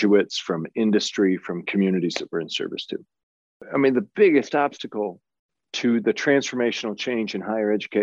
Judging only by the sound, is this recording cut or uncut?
cut